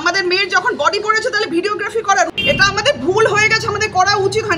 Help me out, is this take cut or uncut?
cut